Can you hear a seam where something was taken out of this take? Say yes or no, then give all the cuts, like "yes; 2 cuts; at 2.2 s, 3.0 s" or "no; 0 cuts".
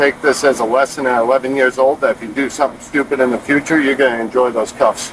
no; 0 cuts